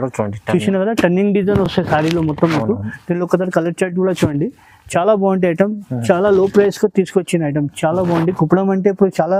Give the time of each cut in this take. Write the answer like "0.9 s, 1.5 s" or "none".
none